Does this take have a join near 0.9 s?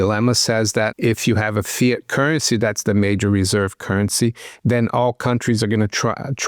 yes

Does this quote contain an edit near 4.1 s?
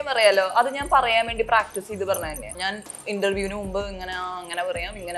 no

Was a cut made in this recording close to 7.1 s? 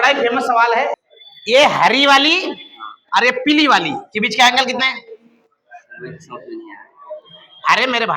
no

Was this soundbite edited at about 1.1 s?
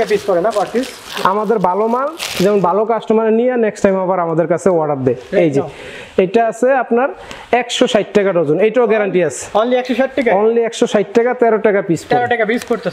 yes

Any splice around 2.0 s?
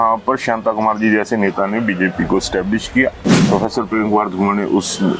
no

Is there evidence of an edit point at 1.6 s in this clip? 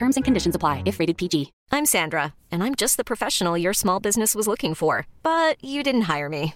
yes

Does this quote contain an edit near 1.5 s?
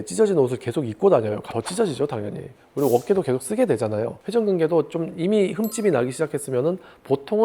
yes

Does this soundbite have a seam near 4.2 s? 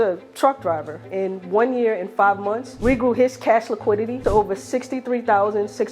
yes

